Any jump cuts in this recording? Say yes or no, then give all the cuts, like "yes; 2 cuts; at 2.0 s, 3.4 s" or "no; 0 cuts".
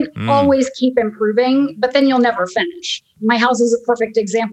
yes; 1 cut; at 3.1 s